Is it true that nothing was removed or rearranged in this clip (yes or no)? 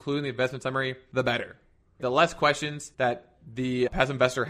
no